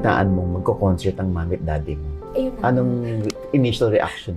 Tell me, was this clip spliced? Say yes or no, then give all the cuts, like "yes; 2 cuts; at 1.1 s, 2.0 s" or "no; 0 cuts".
no; 0 cuts